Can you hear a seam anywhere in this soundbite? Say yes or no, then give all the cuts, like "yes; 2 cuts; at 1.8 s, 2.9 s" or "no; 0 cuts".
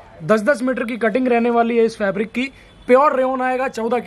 no; 0 cuts